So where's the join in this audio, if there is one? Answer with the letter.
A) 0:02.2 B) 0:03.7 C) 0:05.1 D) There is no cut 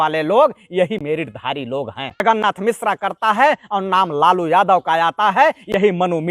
A